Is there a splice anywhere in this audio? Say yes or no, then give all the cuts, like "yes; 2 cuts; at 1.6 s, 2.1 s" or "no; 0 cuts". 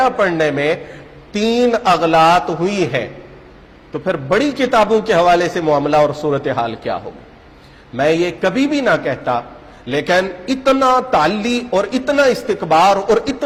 no; 0 cuts